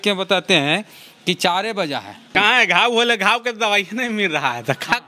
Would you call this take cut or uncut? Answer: cut